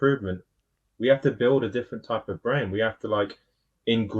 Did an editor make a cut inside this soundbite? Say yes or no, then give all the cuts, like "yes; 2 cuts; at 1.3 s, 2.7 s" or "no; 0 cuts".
no; 0 cuts